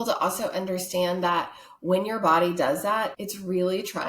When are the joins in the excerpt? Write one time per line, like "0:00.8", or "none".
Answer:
0:03.1